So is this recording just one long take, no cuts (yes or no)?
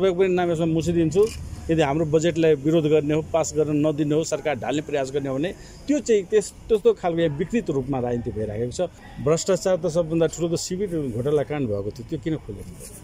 no